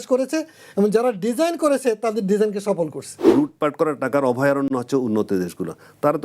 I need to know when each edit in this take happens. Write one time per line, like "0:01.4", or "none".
0:03.3